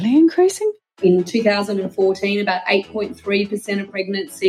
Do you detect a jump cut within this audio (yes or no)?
yes